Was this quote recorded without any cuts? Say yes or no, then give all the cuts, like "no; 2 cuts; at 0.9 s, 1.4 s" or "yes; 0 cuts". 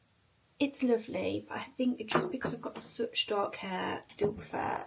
yes; 0 cuts